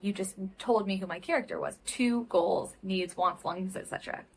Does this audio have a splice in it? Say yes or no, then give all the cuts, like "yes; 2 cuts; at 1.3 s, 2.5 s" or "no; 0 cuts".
yes; 1 cut; at 1.7 s